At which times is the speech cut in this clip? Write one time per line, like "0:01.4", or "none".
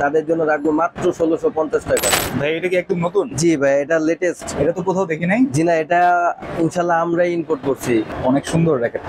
0:02.1
0:08.1